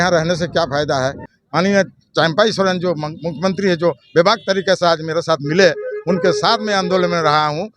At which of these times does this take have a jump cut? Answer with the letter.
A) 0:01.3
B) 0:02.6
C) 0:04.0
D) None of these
A